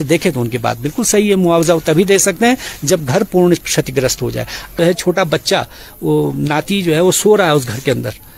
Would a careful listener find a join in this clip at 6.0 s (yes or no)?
no